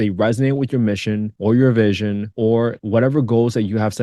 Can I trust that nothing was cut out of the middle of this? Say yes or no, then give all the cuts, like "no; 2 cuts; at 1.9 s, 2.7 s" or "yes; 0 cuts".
no; 2 cuts; at 1.3 s, 2.5 s